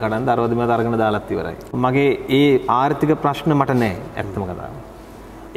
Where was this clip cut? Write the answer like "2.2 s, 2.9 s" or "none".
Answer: 1.7 s